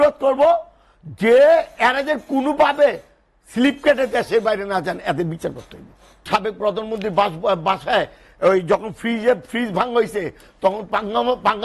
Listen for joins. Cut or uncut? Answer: cut